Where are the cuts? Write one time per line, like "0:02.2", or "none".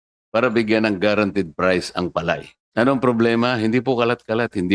0:02.5